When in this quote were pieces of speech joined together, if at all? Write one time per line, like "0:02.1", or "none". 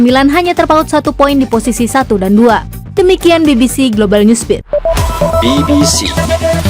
0:02.8